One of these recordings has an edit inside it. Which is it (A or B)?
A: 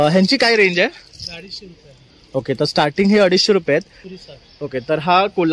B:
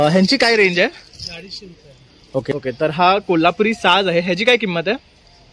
B